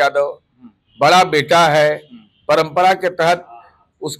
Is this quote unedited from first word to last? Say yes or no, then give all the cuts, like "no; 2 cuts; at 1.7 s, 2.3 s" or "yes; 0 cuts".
yes; 0 cuts